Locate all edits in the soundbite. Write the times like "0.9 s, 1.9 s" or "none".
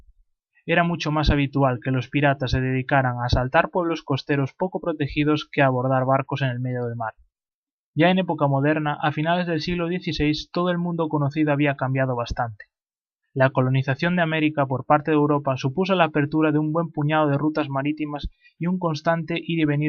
9.2 s